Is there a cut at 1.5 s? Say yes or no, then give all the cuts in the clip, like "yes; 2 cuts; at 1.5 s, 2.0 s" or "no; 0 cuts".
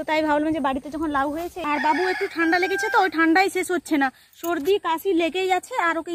yes; 1 cut; at 1.5 s